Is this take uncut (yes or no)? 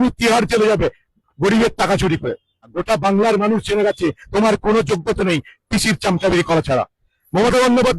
no